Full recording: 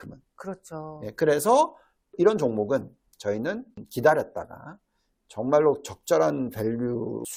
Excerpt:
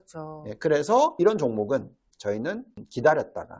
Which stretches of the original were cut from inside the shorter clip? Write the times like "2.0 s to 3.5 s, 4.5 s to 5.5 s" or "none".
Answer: 1.7 s to 2.1 s